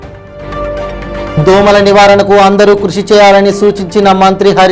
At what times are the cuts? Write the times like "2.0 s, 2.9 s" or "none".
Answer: 1.4 s